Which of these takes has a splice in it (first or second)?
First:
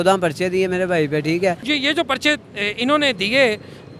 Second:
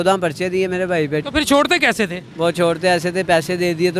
second